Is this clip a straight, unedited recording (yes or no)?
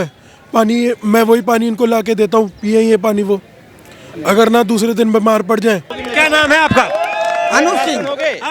no